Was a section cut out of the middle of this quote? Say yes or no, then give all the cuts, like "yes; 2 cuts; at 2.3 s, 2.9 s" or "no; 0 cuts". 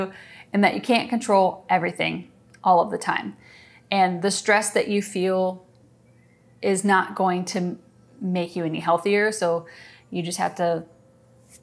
no; 0 cuts